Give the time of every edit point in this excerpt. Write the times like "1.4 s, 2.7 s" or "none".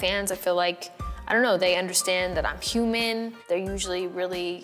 3.4 s

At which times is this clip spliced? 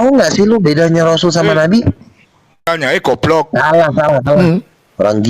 2.6 s

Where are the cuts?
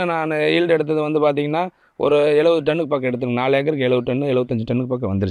none

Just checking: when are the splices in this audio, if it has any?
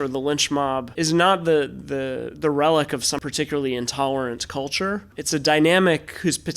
0.9 s, 3.2 s, 5.2 s

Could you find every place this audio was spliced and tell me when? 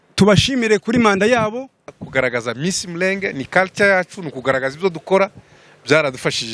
2.0 s

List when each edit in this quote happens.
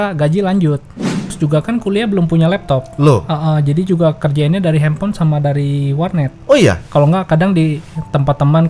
1.3 s

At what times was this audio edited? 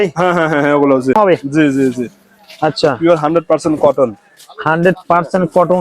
1.2 s

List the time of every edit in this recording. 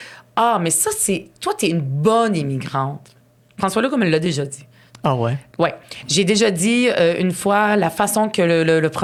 none

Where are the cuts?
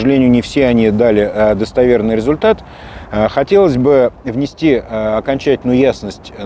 none

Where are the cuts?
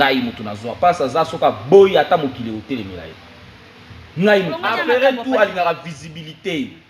4.7 s

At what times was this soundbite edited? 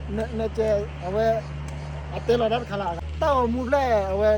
3.0 s

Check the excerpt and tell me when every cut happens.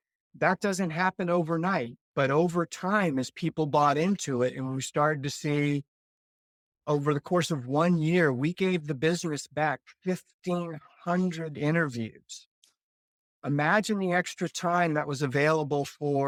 none

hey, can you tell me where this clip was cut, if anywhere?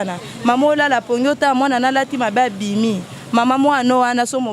none

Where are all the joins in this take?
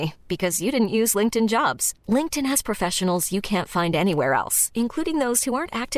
none

